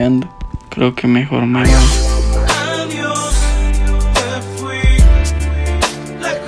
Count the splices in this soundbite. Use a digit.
0